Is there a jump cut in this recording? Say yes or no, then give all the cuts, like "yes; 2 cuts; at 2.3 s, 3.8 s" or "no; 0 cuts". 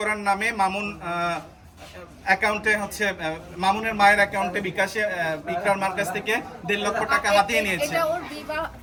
no; 0 cuts